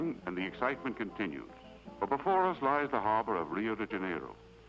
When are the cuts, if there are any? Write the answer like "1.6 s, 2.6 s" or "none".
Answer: 3.6 s